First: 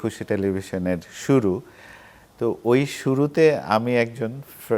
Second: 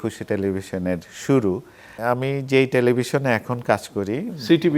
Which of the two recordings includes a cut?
second; 1 cut; at 1.9 s

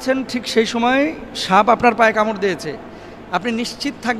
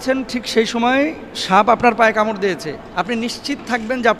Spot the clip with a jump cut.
second; 1 cut; at 3.3 s

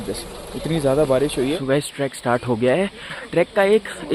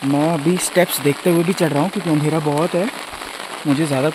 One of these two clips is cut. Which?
first; 2 cuts; at 1.6 s, 3.2 s

